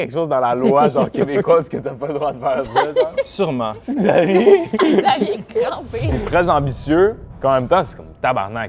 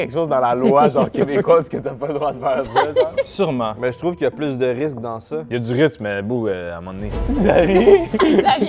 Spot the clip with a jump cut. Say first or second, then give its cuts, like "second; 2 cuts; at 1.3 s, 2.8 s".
first; 2 cuts; at 3.8 s, 6.1 s